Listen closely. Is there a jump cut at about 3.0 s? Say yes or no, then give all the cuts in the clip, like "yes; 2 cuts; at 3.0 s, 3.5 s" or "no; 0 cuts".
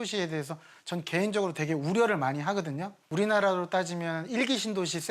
yes; 1 cut; at 3.0 s